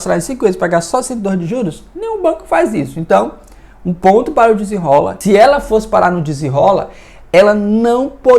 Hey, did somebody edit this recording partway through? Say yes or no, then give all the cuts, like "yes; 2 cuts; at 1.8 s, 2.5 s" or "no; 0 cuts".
yes; 1 cut; at 5.2 s